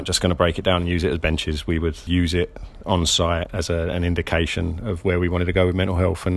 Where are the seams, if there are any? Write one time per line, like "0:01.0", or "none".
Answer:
0:02.0
0:03.5